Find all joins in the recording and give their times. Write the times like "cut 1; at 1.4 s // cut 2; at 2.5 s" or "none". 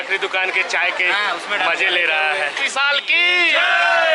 cut 1; at 2.6 s